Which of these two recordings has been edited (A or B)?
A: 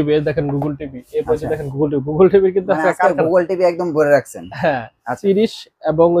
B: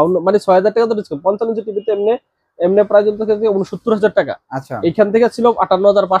A